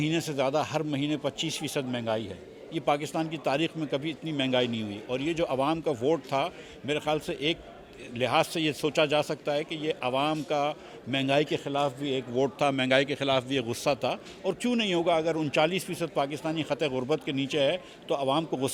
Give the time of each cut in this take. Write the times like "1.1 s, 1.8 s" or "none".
none